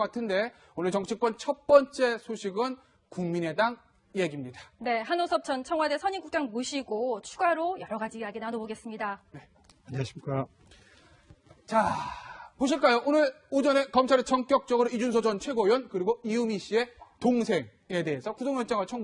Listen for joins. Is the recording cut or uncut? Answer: uncut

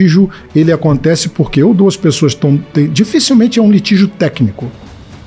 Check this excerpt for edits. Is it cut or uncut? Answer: uncut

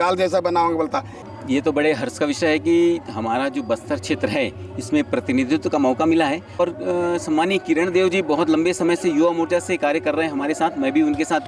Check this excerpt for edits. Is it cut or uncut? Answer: cut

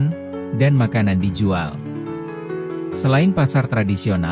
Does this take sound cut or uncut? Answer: cut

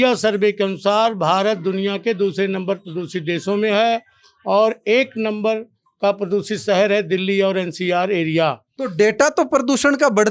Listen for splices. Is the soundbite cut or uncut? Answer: cut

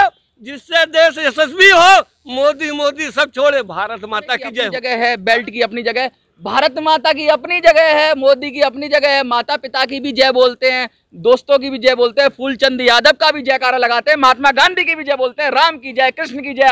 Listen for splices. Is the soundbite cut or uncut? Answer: cut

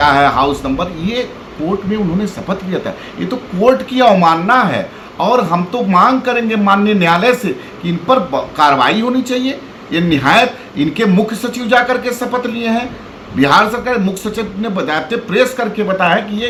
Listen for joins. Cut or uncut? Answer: uncut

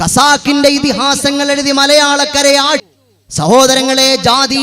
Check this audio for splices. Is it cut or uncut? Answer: cut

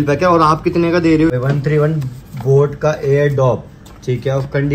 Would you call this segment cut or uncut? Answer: cut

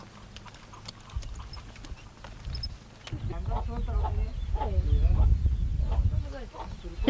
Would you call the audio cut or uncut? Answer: cut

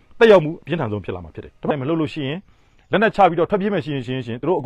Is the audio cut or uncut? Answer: cut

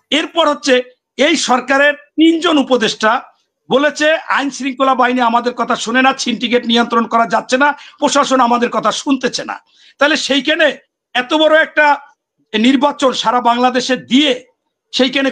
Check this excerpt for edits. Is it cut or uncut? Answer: uncut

